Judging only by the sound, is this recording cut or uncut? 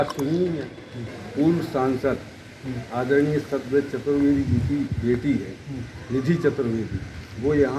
cut